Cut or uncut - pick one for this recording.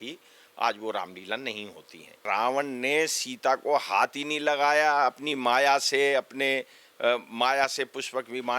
cut